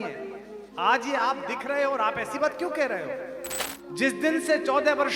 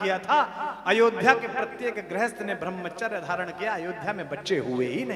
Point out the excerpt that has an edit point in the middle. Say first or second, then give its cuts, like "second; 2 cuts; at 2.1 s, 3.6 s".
first; 1 cut; at 3.6 s